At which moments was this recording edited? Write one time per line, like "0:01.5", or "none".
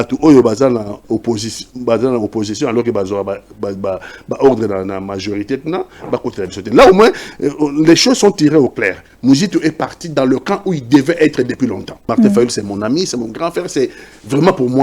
0:01.0
0:12.1